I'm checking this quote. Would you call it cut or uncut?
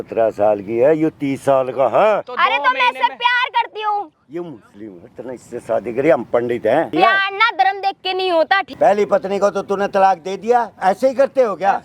cut